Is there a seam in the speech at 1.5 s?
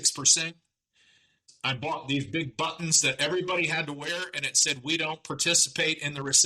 yes; 1 cut; at 1.5 s

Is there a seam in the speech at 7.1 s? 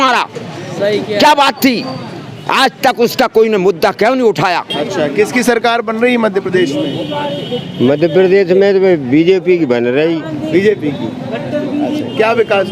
no; 1 cut; at 4.8 s

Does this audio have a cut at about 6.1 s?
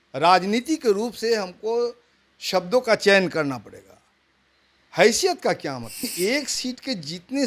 yes; 1 cut; at 6.1 s

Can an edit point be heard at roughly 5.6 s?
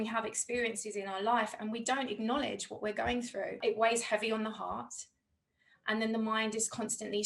no; 1 cut; at 3.6 s

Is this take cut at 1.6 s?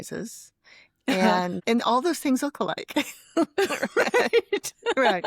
yes; 1 cut; at 1.6 s

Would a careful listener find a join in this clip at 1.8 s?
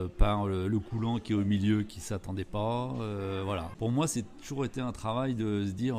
no; 1 cut; at 3.7 s

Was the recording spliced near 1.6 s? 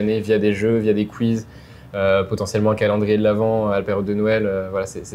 no; 0 cuts

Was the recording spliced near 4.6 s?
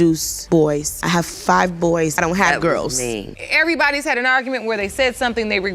no; 2 cuts; at 2.1 s, 3.4 s

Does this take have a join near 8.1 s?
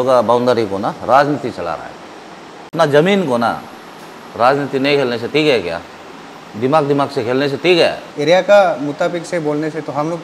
yes; 2 cuts; at 2.7 s, 8.1 s

